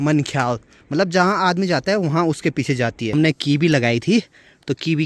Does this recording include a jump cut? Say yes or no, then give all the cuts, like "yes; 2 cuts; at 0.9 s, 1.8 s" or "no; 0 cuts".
yes; 1 cut; at 3.1 s